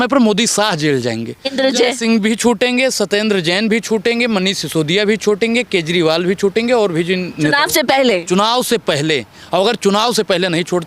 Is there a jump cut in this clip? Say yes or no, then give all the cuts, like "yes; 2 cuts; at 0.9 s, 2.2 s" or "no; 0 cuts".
yes; 1 cut; at 1.5 s